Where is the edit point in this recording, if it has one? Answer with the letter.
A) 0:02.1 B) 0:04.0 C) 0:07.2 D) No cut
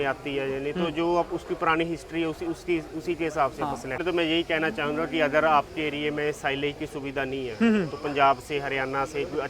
B